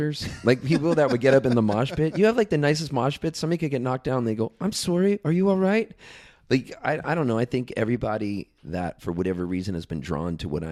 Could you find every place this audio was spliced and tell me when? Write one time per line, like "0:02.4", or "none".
none

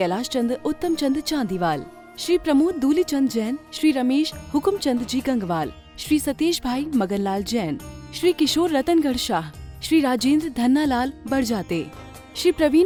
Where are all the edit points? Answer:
none

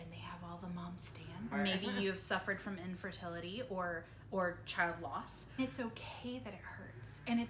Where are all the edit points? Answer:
0:01.5
0:05.6

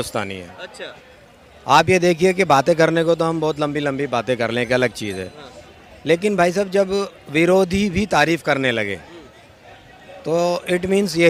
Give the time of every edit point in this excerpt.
none

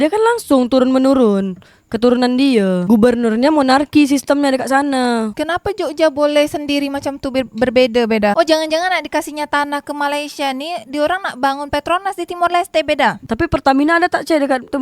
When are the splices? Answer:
0:08.3

